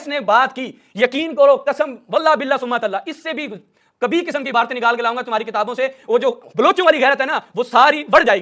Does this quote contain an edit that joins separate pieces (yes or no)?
no